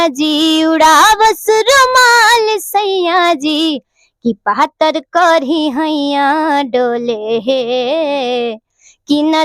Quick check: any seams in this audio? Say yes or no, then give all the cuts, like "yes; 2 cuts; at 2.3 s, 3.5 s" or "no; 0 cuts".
no; 0 cuts